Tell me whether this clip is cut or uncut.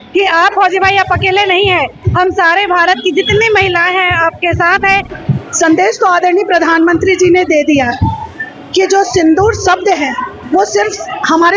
cut